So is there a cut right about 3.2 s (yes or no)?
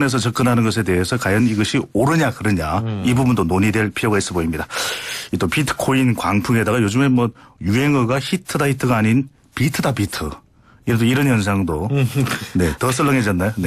no